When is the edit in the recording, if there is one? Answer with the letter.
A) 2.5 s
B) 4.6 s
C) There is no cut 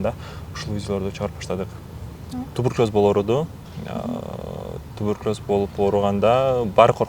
A